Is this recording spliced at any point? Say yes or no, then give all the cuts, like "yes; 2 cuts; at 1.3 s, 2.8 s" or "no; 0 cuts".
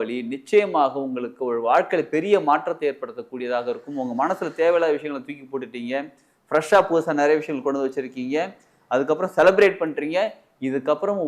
no; 0 cuts